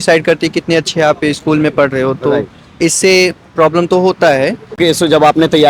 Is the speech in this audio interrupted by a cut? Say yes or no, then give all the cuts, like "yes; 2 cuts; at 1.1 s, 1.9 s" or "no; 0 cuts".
yes; 1 cut; at 4.8 s